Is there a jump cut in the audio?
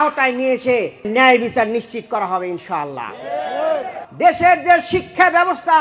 yes; 1 cut; at 4.0 s

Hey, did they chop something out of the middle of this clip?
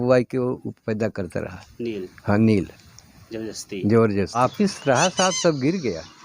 yes; 1 cut; at 4.4 s

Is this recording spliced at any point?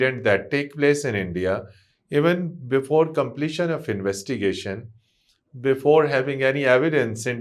no; 0 cuts

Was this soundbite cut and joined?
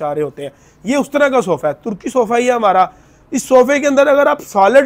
no; 0 cuts

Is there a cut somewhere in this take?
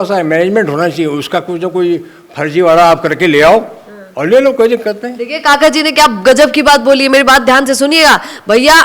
no; 0 cuts

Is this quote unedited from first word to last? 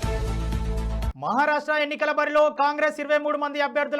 no; 1 cut; at 1.1 s

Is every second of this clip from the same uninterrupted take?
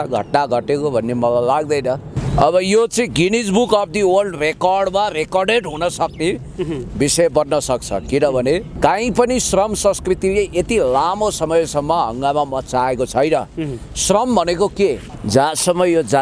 no; 1 cut; at 15.1 s

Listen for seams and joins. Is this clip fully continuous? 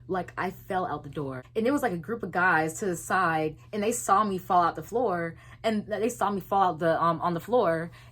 no; 1 cut; at 1.4 s

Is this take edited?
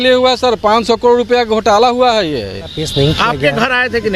yes; 1 cut; at 2.8 s

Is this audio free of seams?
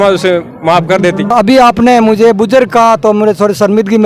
no; 1 cut; at 1.3 s

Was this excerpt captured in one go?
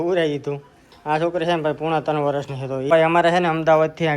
no; 1 cut; at 2.9 s

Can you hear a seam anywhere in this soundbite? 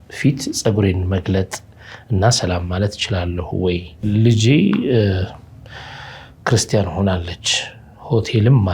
yes; 1 cut; at 4.1 s

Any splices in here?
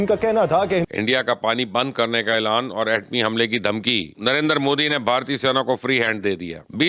yes; 1 cut; at 0.9 s

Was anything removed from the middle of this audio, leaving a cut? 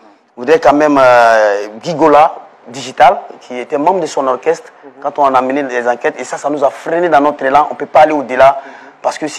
no; 0 cuts

